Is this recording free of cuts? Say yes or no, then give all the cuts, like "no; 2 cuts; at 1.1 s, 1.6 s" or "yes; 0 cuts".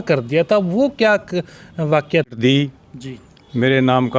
no; 1 cut; at 2.3 s